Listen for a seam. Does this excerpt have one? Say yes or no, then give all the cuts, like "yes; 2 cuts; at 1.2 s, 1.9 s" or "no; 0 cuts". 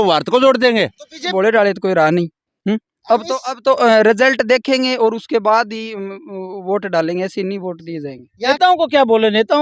yes; 2 cuts; at 1.3 s, 8.5 s